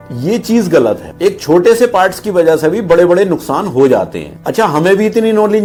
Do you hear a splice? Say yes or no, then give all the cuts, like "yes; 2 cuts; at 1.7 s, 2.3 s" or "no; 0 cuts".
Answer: no; 0 cuts